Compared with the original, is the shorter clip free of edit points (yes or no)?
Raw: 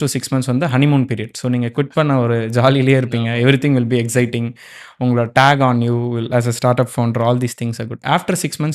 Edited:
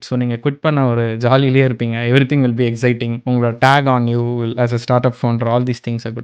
no